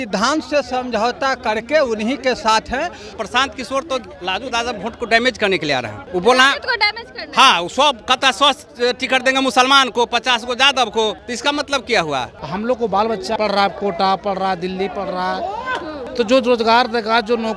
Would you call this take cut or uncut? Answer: cut